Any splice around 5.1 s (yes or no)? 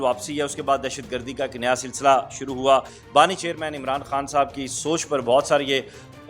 no